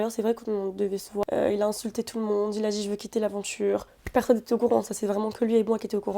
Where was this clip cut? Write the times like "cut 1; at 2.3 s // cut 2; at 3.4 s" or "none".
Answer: cut 1; at 1.2 s // cut 2; at 3.9 s